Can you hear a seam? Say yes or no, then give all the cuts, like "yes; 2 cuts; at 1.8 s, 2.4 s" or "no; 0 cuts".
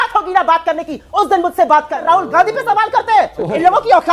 yes; 1 cut; at 2.0 s